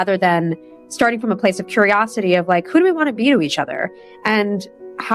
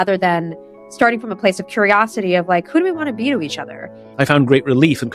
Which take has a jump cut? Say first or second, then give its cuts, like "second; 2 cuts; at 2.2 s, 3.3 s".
second; 1 cut; at 4.0 s